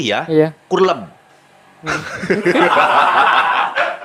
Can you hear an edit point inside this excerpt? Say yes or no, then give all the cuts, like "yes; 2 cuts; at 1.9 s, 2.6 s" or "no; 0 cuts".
no; 0 cuts